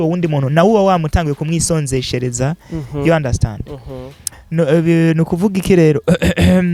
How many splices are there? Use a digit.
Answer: 0